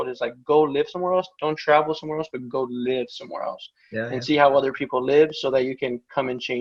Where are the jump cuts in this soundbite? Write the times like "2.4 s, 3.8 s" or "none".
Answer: none

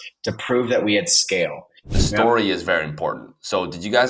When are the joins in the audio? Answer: 1.9 s

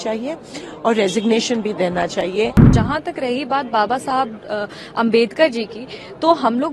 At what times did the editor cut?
2.7 s

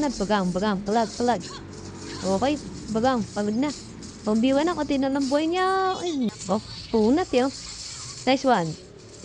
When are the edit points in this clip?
6.3 s

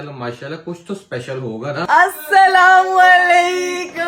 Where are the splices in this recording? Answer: 1.8 s

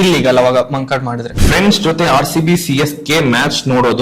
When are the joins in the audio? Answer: 1.6 s

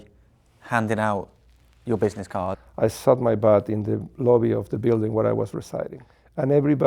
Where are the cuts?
2.6 s

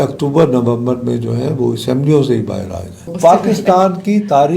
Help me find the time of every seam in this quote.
3.1 s

